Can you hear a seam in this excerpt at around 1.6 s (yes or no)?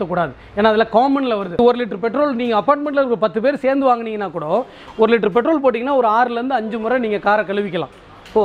yes